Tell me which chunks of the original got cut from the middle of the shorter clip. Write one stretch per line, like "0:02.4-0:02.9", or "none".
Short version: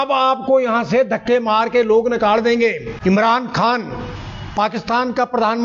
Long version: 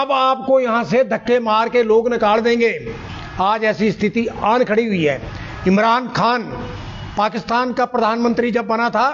0:02.9-0:05.5